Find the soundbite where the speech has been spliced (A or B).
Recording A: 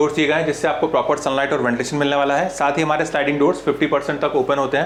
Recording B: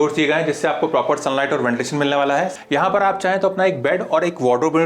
B